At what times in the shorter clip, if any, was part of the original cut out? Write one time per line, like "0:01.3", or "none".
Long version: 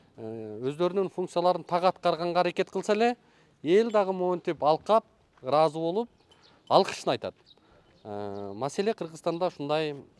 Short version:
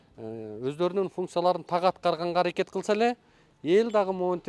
none